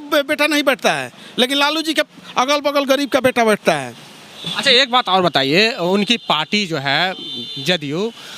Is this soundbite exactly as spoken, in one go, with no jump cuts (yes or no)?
yes